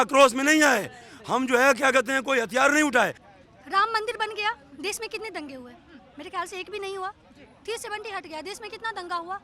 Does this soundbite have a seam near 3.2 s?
yes; 1 cut; at 3.2 s

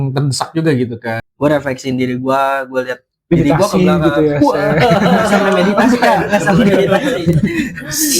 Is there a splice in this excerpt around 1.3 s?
yes; 1 cut; at 1.3 s

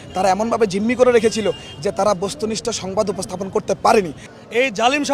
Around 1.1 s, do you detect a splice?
no; 1 cut; at 4.2 s

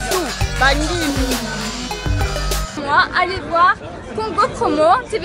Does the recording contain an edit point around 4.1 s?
no; 1 cut; at 2.8 s

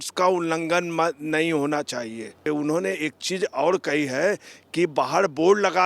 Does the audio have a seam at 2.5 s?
yes; 1 cut; at 2.5 s

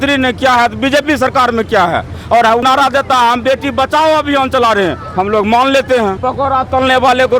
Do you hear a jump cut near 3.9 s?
no; 2 cuts; at 2.6 s, 6.2 s

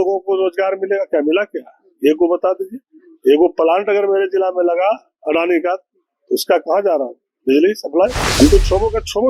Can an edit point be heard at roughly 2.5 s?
no; 1 cut; at 8.2 s

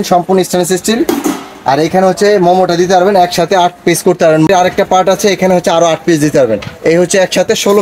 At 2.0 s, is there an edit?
no; 1 cut; at 4.5 s

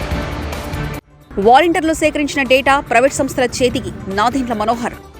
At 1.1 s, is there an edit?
yes; 1 cut; at 1.1 s

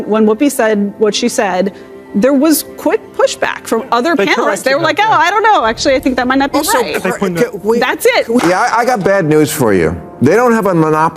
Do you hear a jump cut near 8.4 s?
yes; 1 cut; at 8.4 s

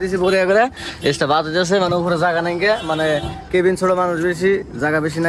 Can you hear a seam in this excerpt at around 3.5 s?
no; 0 cuts

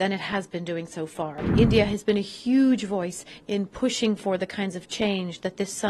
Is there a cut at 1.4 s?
yes; 1 cut; at 1.4 s

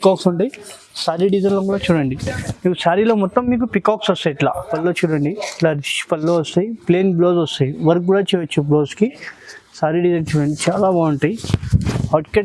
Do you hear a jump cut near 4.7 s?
yes; 1 cut; at 4.7 s

